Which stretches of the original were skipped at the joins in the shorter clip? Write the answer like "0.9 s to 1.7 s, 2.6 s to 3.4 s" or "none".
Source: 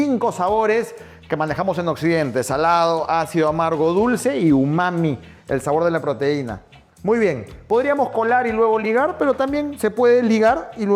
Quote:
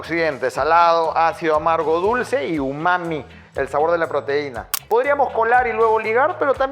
6.6 s to 7.5 s